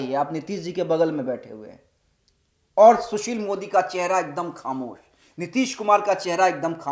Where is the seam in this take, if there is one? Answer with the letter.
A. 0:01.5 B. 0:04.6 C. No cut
C